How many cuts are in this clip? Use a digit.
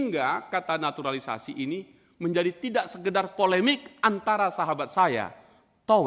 0